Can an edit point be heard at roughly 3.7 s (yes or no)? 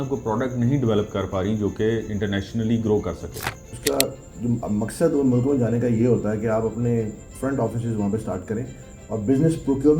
yes